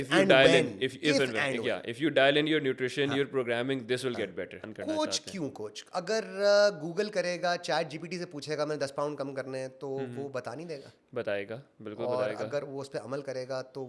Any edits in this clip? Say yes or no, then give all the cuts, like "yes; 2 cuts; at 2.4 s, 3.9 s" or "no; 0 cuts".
yes; 1 cut; at 4.6 s